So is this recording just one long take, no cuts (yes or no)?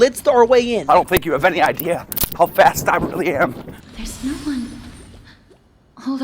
yes